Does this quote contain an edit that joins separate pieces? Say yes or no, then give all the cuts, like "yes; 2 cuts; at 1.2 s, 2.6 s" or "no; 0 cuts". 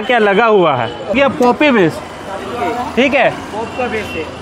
yes; 1 cut; at 1.2 s